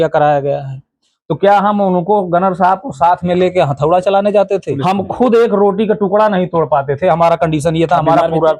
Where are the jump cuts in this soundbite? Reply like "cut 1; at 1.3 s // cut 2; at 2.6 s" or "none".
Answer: cut 1; at 4.7 s

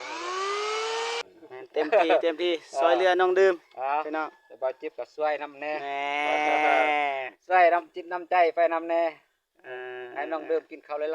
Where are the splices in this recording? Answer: cut 1; at 1.2 s

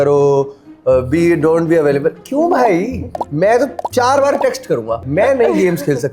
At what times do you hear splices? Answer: cut 1; at 5.0 s

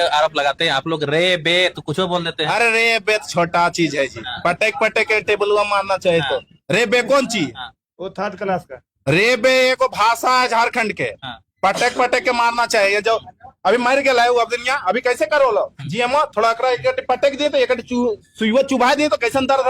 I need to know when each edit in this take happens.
none

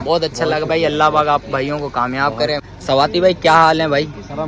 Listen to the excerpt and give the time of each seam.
cut 1; at 2.7 s

